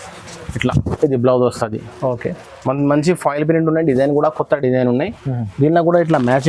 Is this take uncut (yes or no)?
yes